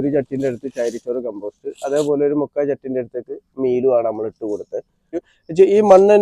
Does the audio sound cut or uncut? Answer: cut